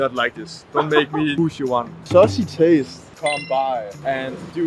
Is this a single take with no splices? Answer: no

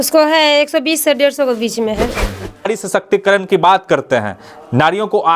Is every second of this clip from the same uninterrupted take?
no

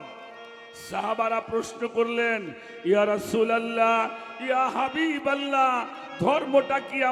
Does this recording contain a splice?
no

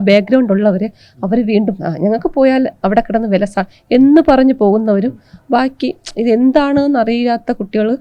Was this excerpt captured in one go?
yes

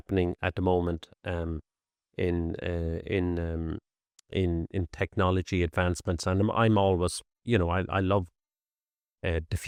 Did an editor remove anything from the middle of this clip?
no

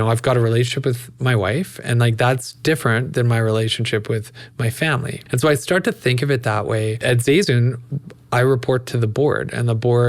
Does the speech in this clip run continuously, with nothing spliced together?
no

